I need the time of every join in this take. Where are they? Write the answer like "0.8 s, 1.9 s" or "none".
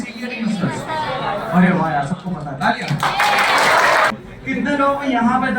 4.1 s